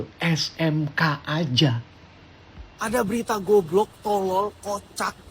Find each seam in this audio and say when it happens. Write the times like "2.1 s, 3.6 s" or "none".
2.7 s